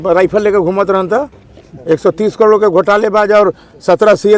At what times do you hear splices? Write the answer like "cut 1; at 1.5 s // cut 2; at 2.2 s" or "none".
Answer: none